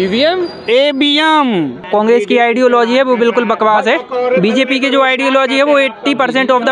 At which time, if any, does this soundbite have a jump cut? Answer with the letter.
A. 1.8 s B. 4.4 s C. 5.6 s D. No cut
A